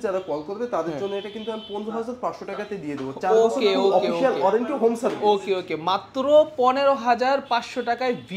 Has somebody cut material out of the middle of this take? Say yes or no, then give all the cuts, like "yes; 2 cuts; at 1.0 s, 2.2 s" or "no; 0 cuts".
no; 0 cuts